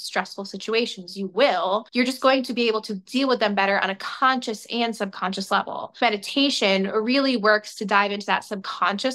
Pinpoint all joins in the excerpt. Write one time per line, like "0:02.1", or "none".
0:01.9
0:06.0